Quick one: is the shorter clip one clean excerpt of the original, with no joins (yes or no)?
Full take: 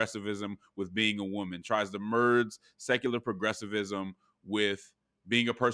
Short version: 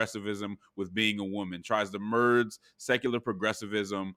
yes